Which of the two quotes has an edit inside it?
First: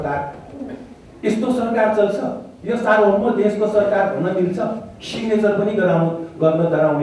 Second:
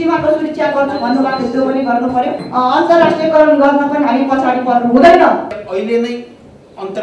second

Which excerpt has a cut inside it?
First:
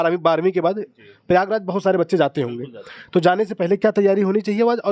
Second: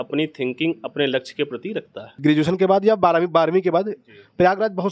second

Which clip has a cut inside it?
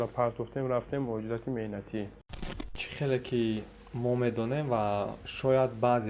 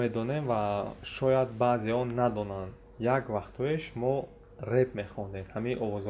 first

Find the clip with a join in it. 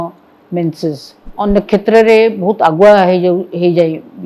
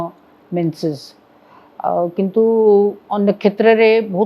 first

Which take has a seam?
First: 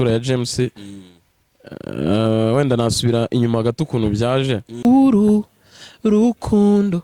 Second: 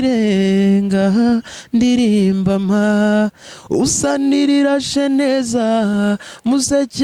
first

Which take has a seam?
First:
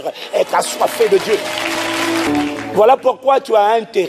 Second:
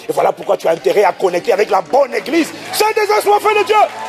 first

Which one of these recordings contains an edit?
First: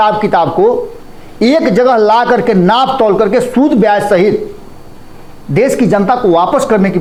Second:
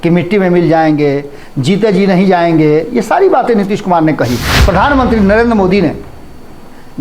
second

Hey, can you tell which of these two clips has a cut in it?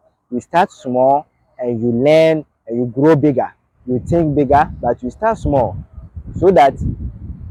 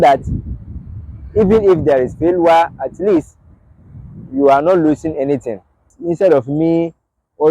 second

